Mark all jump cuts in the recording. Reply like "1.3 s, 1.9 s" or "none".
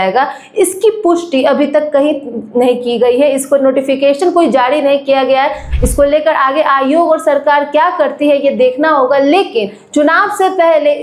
5.7 s